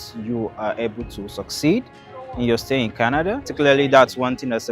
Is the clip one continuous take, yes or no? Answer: no